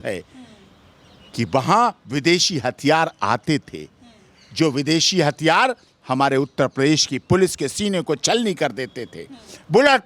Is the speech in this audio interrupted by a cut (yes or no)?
no